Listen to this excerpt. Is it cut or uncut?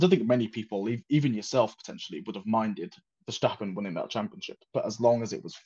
uncut